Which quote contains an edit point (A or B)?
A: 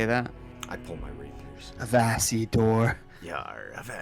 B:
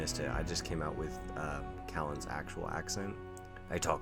A